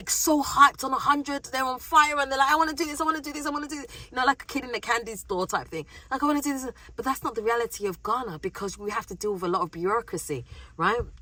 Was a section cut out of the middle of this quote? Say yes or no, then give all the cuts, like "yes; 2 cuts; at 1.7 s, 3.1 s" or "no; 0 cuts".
no; 0 cuts